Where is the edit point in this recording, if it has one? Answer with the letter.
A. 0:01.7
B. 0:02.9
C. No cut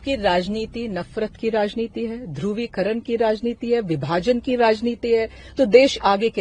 C